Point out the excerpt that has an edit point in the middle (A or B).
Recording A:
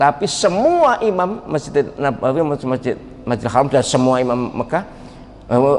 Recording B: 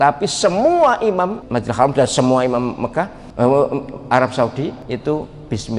B